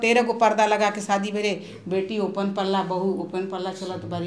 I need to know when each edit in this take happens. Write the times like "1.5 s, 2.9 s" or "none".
none